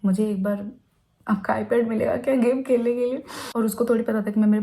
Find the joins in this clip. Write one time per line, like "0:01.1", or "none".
0:03.4